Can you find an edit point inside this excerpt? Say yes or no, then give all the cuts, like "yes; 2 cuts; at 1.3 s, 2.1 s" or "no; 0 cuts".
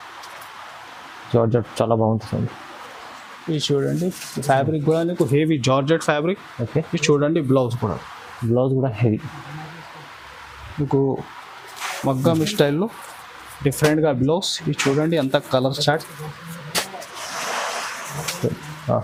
no; 0 cuts